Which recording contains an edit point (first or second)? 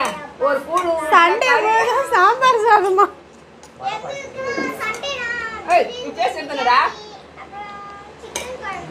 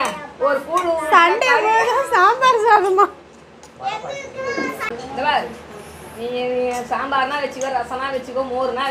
second